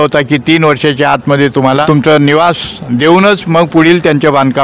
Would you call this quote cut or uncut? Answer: cut